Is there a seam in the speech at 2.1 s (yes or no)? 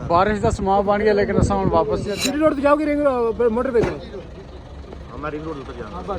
yes